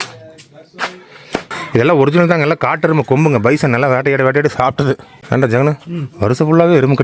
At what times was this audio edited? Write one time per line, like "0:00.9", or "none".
0:01.6
0:05.1